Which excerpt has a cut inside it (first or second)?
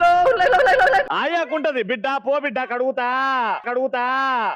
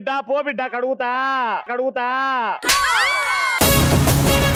first